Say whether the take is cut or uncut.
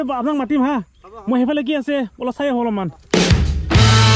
cut